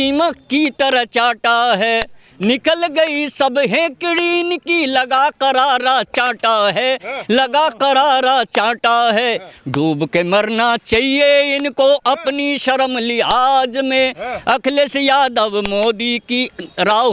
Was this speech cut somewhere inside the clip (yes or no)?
no